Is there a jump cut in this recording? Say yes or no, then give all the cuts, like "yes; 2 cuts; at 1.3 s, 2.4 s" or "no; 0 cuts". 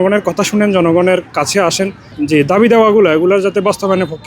yes; 1 cut; at 2.2 s